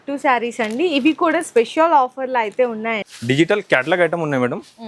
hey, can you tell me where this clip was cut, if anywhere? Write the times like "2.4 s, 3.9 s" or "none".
3.0 s